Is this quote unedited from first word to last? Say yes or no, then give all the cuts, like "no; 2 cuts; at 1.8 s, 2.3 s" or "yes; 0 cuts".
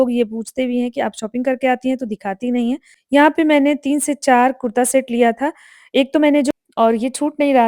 no; 2 cuts; at 2.9 s, 6.5 s